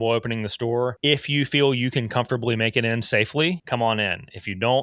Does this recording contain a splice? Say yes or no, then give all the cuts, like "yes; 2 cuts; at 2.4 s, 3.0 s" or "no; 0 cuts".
yes; 2 cuts; at 1.0 s, 3.6 s